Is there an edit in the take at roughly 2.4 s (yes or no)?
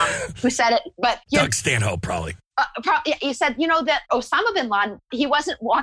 yes